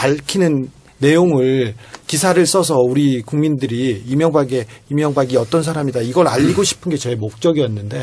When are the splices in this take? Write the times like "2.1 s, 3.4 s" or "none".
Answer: 3.7 s